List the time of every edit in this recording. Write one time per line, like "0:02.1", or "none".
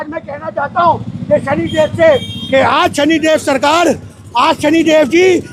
none